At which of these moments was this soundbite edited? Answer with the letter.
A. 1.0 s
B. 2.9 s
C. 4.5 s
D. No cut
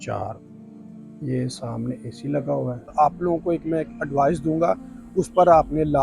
B